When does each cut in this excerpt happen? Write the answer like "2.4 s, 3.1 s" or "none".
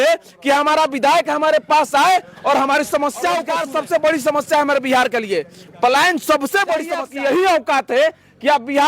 3.5 s, 7.0 s